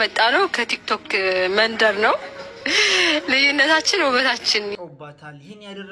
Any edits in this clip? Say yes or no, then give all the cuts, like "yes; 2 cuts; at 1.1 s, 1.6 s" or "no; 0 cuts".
yes; 1 cut; at 4.7 s